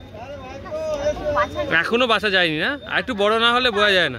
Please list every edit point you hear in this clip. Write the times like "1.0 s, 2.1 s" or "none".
none